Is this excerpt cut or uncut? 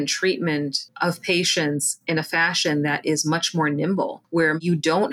uncut